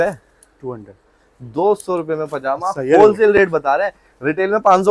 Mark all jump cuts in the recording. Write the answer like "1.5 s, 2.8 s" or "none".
none

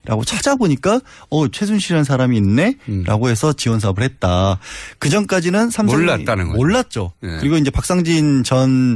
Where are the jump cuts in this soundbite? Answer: 2.5 s

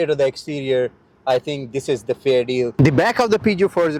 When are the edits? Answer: 2.7 s

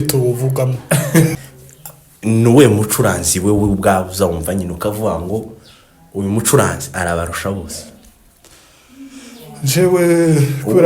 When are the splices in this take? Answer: 1.3 s

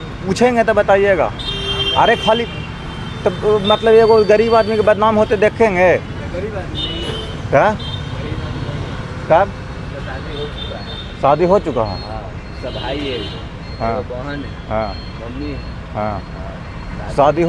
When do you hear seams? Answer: none

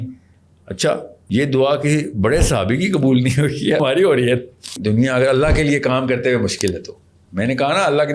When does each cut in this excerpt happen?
1.1 s, 3.8 s, 4.8 s

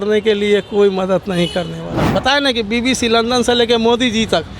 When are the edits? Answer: 2.0 s

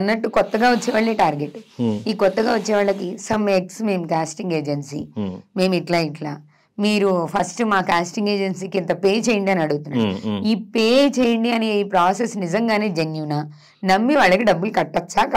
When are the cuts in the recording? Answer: none

